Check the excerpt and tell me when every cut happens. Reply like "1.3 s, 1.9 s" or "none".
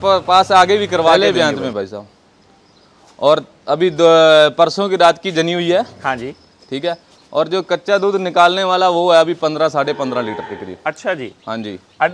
1.2 s